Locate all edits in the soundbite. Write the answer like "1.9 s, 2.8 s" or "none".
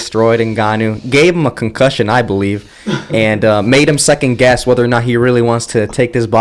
none

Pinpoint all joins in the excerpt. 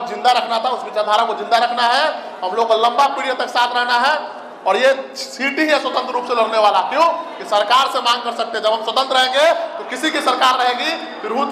none

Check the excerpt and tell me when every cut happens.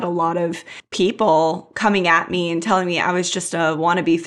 none

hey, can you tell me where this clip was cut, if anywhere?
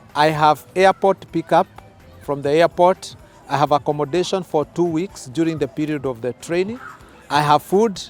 none

